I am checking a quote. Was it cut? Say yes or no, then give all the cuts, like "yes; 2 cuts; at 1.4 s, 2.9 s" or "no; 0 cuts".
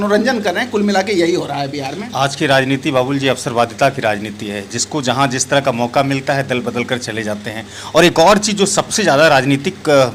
no; 0 cuts